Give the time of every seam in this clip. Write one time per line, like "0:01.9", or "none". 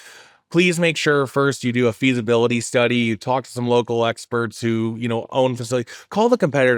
none